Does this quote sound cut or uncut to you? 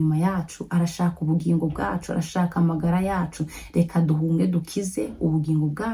uncut